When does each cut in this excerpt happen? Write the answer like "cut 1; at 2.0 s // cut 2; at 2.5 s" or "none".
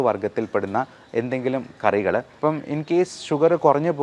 cut 1; at 2.3 s